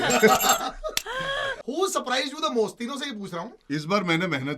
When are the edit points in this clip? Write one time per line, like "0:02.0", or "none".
0:01.5